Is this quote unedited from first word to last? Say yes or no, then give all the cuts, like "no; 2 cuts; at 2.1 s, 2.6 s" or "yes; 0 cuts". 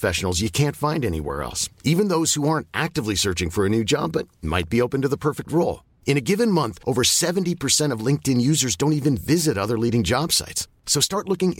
yes; 0 cuts